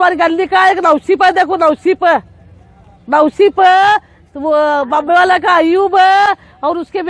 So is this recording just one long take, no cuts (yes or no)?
yes